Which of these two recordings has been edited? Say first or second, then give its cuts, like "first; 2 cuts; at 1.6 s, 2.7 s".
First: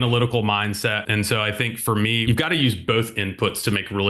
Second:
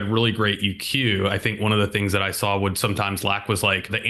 first; 2 cuts; at 1.0 s, 2.2 s